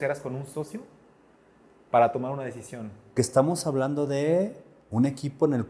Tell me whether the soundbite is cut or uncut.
cut